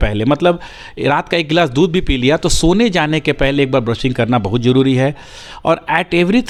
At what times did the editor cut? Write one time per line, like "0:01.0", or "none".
none